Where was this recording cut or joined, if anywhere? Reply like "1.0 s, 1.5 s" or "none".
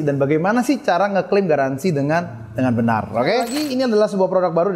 3.6 s